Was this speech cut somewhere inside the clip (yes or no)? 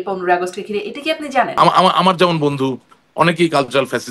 yes